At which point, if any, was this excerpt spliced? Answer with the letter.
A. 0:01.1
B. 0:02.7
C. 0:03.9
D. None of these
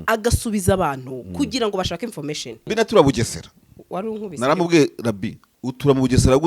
B